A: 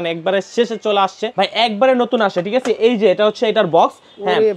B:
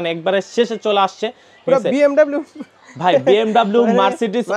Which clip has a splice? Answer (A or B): A